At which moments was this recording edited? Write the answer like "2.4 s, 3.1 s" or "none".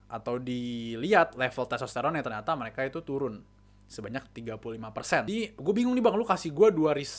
5.3 s

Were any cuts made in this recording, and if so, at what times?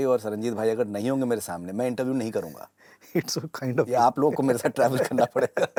none

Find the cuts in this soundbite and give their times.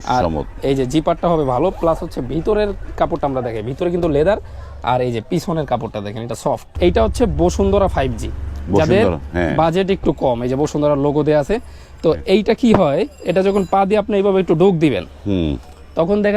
6.7 s

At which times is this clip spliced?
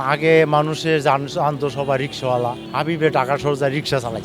2.6 s

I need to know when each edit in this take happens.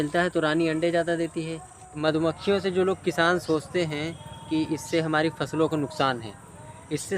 1.9 s

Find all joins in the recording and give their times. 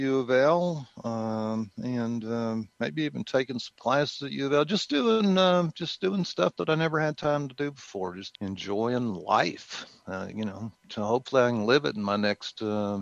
8.3 s

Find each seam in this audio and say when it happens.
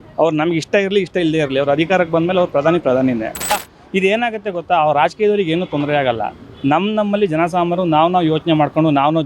3.5 s

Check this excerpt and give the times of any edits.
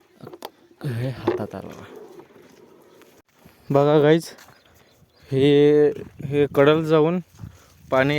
3.3 s

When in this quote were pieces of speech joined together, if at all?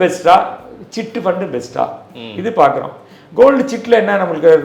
none

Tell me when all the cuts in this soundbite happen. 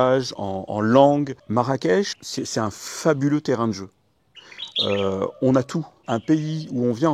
1.4 s, 6.0 s

